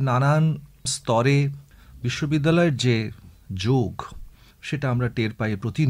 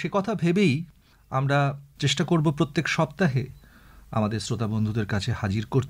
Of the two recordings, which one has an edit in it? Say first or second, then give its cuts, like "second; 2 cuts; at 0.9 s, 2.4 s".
second; 1 cut; at 1.9 s